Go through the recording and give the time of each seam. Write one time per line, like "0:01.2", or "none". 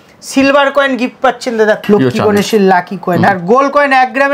0:01.8
0:03.3